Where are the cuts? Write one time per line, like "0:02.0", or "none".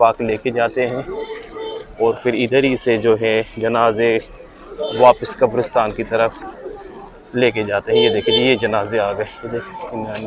none